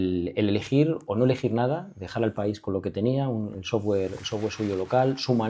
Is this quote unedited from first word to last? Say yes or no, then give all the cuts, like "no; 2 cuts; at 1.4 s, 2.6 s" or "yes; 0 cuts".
yes; 0 cuts